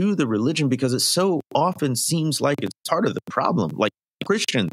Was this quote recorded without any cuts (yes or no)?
yes